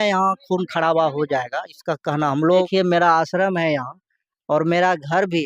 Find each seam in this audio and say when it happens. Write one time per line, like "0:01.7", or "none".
0:02.7